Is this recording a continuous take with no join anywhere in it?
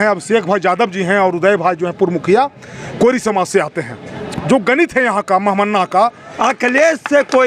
no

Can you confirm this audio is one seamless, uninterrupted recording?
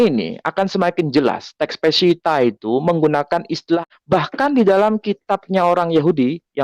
no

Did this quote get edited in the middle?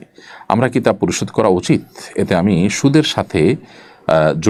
no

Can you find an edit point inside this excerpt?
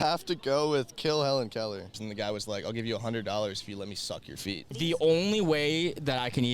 yes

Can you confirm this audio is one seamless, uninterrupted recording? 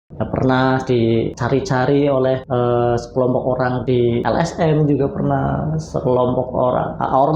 no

